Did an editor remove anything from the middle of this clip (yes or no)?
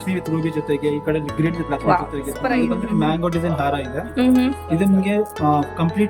yes